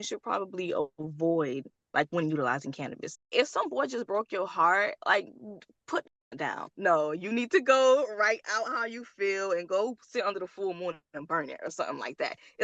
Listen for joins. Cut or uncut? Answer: cut